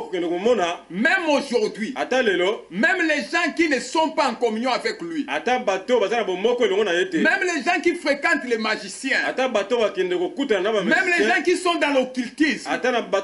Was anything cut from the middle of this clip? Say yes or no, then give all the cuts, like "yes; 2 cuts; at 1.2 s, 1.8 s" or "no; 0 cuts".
no; 0 cuts